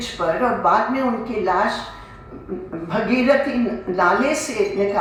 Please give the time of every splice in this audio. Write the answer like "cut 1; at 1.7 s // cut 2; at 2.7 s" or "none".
none